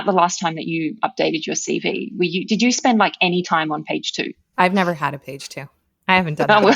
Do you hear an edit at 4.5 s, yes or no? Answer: yes